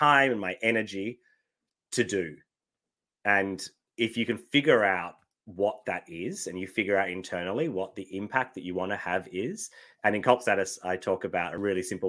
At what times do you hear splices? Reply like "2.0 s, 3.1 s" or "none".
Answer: none